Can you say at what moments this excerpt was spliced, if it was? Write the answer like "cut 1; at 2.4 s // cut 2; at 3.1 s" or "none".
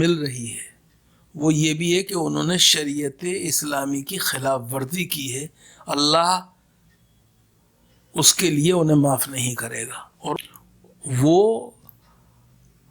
cut 1; at 10.4 s